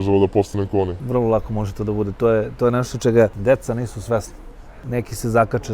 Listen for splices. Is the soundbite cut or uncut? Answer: cut